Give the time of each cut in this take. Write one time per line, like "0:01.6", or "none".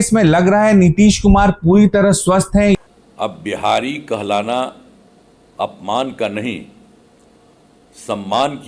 0:02.8